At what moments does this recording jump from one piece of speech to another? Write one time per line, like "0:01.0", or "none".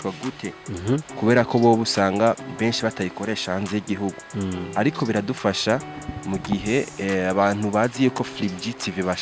none